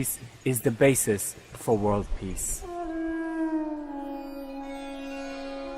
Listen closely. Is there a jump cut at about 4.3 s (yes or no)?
yes